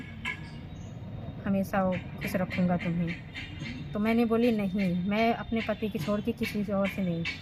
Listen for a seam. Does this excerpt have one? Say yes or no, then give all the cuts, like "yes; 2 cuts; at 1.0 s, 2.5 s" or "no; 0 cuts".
no; 0 cuts